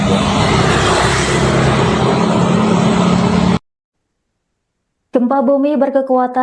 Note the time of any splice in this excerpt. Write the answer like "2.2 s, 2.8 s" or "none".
3.5 s